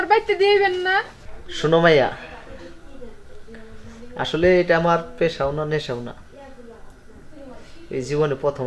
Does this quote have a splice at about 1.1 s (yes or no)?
yes